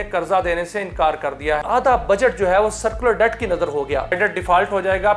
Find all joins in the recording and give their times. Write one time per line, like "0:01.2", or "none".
0:01.6
0:04.2